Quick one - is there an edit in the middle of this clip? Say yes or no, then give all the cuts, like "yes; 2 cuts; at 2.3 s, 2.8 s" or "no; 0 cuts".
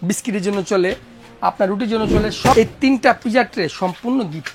yes; 1 cut; at 2.5 s